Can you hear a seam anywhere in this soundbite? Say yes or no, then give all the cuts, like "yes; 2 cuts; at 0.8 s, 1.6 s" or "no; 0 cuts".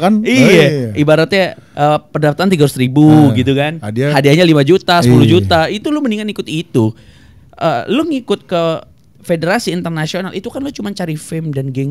no; 0 cuts